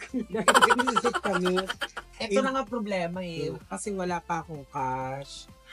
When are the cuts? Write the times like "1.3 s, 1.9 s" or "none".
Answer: 2.1 s